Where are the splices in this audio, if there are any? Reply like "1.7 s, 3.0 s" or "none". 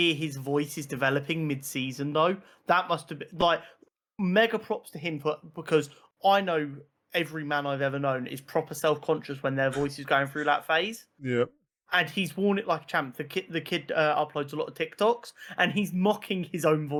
none